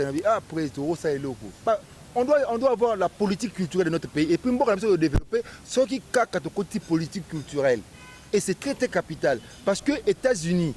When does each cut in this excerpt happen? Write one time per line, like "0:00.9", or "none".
0:01.6